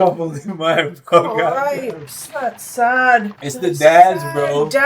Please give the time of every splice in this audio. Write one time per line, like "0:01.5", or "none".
0:03.4